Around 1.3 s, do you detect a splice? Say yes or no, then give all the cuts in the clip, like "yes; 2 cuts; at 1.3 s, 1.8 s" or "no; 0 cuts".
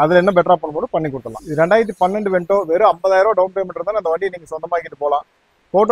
no; 0 cuts